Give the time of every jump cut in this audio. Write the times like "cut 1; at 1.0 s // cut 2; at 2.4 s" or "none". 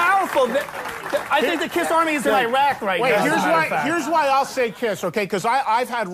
cut 1; at 2.0 s